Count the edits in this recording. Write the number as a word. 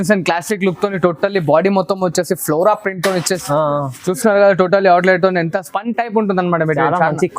one